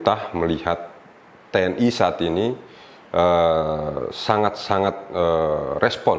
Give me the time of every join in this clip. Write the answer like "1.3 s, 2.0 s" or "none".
none